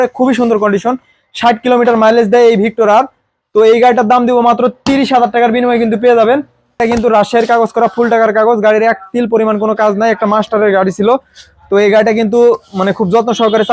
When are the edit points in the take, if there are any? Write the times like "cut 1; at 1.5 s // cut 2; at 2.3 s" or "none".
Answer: cut 1; at 6.8 s